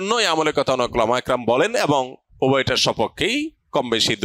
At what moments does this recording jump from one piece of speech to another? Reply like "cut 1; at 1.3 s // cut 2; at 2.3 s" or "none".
cut 1; at 2.2 s